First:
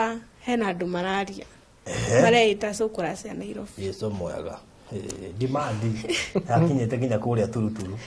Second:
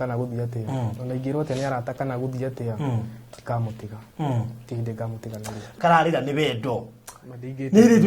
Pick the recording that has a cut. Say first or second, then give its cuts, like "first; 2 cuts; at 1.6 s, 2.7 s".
second; 1 cut; at 5.7 s